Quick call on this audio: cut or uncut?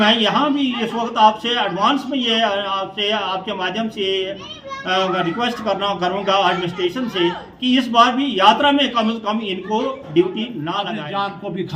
cut